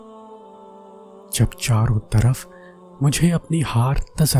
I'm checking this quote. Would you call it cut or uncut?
uncut